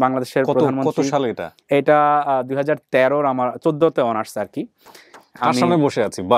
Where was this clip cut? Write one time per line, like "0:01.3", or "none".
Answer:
none